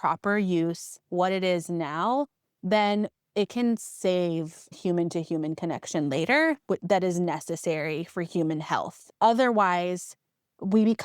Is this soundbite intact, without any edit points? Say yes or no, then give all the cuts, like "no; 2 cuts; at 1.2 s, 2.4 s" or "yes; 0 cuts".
no; 3 cuts; at 3.2 s, 4.7 s, 9.1 s